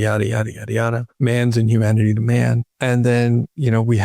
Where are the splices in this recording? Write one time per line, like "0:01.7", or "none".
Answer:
0:01.1
0:02.7